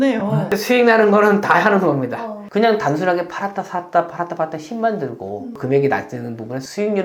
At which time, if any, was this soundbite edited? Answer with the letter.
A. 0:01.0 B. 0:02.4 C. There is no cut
B